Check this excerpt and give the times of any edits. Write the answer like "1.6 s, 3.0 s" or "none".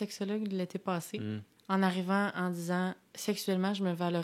1.5 s, 3.1 s